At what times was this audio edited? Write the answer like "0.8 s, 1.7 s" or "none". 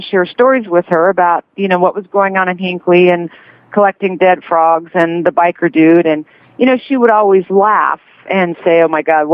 none